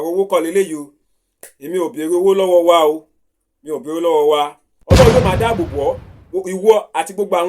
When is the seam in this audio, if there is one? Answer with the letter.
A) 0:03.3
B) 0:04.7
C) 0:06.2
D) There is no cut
B